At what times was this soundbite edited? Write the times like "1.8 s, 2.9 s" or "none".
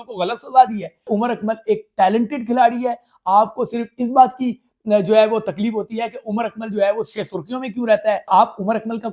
1.1 s, 8.3 s